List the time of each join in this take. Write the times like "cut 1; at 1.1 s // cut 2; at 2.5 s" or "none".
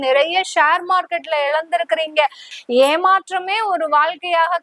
cut 1; at 2.5 s

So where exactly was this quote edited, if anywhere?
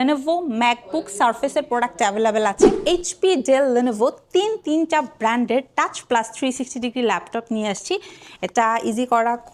cut 1; at 2.7 s

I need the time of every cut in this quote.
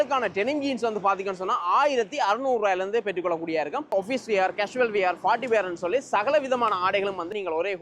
cut 1; at 3.9 s

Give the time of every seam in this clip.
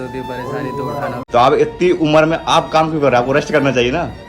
cut 1; at 1.2 s

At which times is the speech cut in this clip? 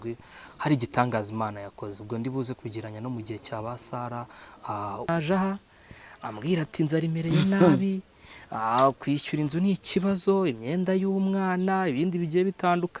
cut 1; at 5.1 s

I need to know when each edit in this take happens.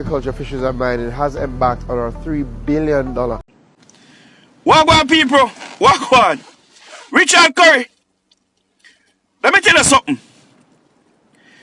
cut 1; at 3.5 s

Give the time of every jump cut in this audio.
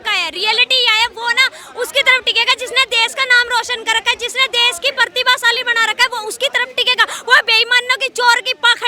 none

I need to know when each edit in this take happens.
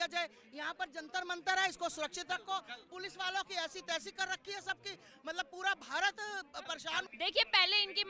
cut 1; at 7.1 s

